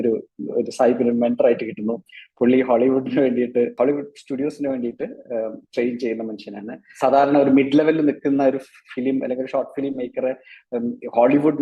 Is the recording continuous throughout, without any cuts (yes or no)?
no